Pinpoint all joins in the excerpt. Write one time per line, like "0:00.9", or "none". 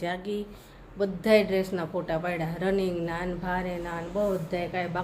none